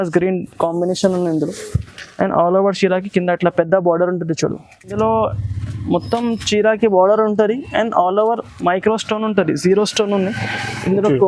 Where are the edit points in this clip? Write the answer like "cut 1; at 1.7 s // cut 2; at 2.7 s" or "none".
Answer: cut 1; at 4.9 s